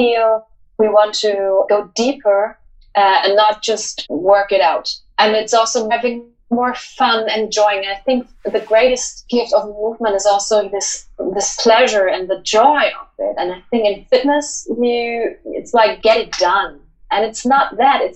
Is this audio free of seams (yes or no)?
no